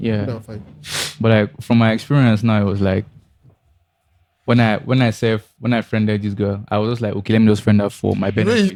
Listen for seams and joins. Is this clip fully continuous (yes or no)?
yes